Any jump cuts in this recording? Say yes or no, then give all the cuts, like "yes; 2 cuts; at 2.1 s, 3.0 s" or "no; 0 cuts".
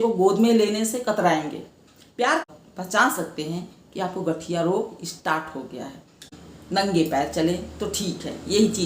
yes; 2 cuts; at 2.4 s, 6.3 s